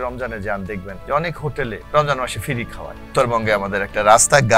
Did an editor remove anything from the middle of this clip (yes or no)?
yes